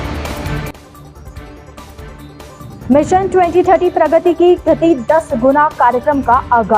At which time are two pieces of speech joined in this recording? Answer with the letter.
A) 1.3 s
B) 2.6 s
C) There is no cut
B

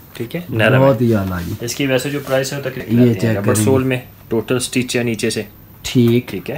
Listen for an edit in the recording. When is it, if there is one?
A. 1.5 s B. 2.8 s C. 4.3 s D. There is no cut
B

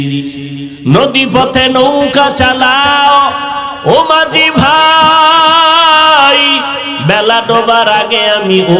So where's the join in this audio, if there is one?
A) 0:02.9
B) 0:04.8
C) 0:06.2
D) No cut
D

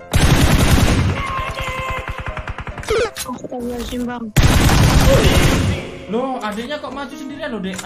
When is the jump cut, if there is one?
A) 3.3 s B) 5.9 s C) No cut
B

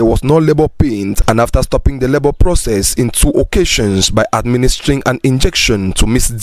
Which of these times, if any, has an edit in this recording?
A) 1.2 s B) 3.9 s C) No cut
A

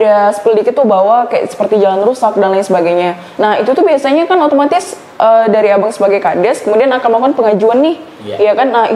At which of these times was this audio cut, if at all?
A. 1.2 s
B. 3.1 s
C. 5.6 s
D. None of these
D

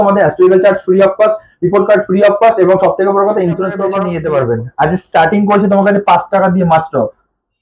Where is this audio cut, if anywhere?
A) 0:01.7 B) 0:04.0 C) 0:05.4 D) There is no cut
B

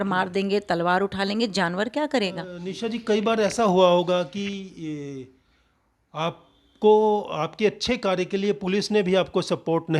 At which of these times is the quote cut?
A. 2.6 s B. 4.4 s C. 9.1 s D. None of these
A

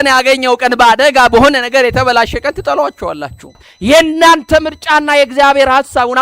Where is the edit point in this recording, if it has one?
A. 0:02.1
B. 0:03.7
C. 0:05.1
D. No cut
B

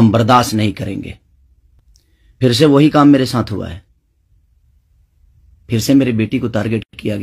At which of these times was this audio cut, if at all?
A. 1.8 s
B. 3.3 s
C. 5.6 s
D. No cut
D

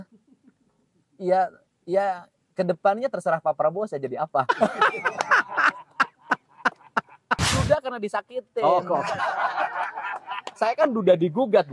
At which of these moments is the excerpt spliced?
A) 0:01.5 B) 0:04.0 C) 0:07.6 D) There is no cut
C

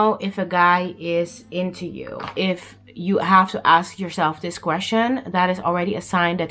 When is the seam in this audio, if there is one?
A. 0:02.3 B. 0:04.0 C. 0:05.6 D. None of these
A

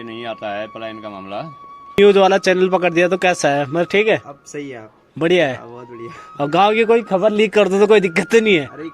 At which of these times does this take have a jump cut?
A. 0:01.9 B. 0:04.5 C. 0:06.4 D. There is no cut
A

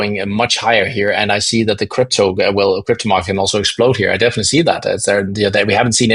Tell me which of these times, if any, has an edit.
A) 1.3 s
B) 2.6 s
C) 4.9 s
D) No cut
D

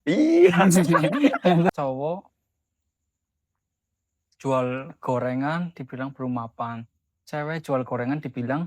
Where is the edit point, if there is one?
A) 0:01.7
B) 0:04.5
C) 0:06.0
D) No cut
A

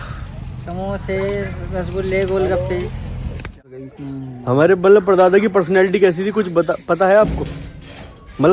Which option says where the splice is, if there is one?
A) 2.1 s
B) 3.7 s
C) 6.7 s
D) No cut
B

